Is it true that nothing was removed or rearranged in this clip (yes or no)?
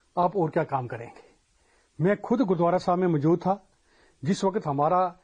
yes